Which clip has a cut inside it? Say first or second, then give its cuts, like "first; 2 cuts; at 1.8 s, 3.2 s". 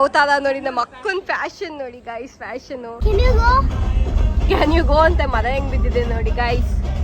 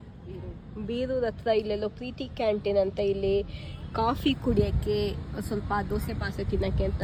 first; 1 cut; at 3.0 s